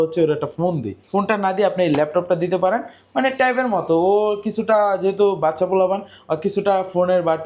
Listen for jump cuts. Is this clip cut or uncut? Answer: uncut